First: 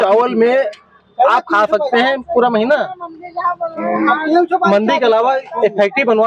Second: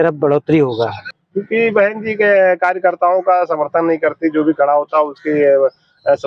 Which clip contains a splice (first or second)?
second